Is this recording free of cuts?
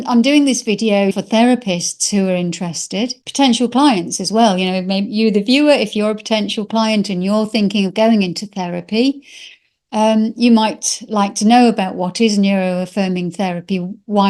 no; 2 cuts; at 1.2 s, 3.2 s

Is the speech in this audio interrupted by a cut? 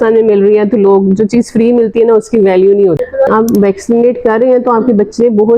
yes; 1 cut; at 3.3 s

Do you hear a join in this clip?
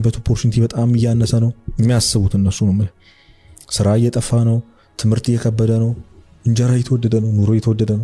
no; 0 cuts

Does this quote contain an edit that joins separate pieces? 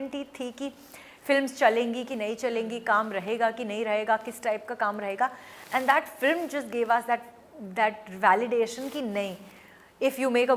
no; 0 cuts

